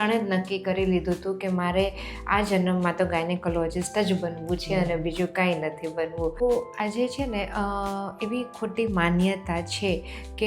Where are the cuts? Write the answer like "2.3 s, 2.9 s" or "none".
6.4 s